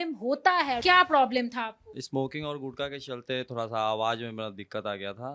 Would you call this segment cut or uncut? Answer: cut